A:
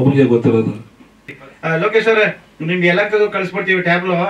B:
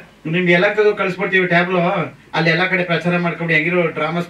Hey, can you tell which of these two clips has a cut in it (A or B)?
A